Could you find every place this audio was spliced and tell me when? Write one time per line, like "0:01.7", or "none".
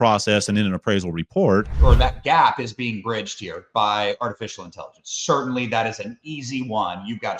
0:01.7